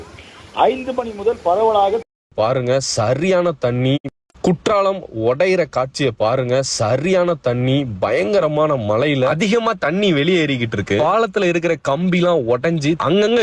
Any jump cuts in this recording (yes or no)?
yes